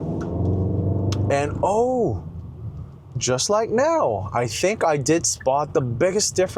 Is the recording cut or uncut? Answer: uncut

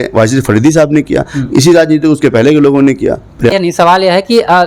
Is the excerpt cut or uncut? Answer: cut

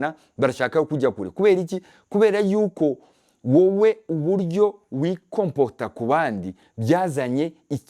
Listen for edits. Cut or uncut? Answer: uncut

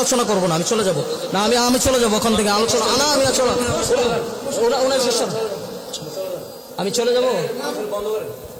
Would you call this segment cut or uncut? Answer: uncut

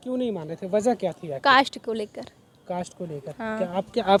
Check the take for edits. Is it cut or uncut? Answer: uncut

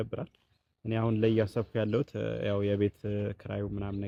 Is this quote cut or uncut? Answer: uncut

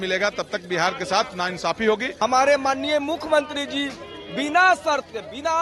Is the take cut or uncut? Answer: cut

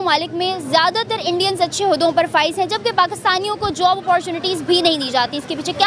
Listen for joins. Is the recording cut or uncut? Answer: uncut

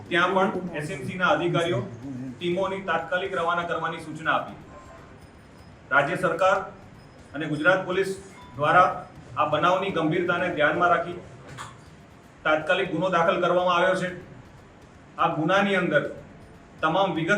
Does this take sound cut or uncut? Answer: uncut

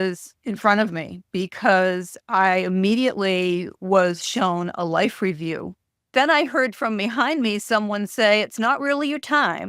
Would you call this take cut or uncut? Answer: cut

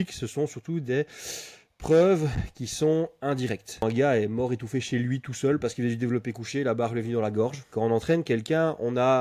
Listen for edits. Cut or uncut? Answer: cut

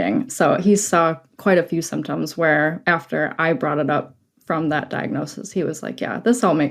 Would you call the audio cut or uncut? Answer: uncut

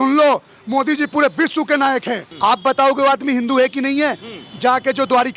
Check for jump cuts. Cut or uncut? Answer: cut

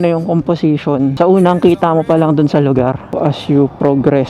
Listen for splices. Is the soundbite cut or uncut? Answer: cut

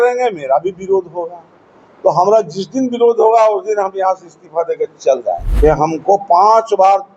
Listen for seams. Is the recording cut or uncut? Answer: cut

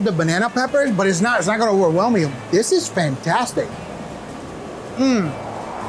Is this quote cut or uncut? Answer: uncut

